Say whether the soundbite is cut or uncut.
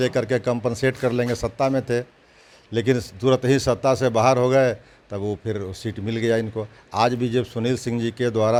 uncut